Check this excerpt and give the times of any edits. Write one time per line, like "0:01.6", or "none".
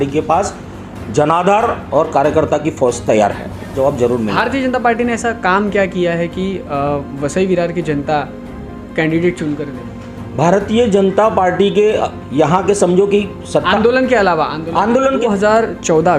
0:03.8
0:15.2

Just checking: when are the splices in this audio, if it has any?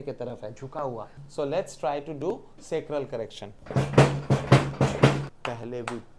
0:01.2
0:05.2

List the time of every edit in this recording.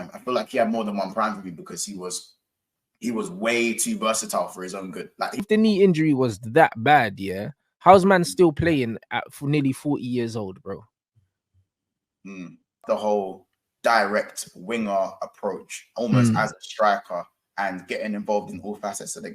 0:05.4
0:12.8

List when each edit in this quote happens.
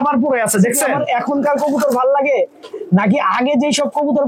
0:01.0

